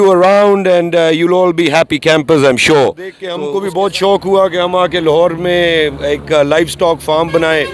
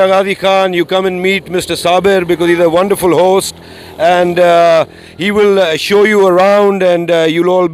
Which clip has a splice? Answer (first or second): first